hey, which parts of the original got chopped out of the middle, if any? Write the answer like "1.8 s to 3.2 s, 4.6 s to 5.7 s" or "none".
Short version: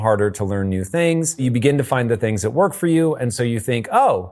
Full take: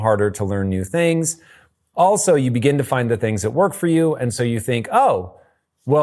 1.4 s to 2.4 s